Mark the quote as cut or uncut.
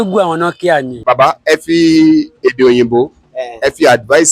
cut